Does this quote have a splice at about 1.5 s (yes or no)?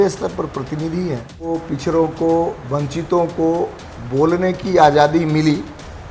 yes